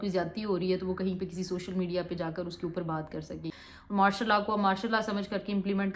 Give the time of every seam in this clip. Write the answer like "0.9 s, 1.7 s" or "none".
3.5 s